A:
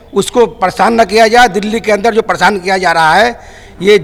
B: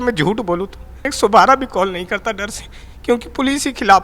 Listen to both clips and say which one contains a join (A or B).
B